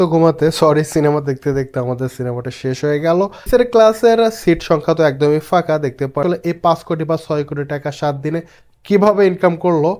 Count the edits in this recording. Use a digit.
2